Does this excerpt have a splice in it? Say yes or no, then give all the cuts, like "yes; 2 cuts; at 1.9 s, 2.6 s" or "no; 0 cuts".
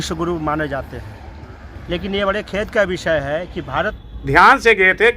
yes; 1 cut; at 4.0 s